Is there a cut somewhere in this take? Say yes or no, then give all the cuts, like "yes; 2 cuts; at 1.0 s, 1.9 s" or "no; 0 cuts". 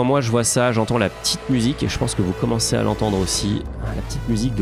no; 0 cuts